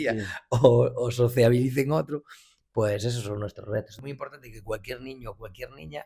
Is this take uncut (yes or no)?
no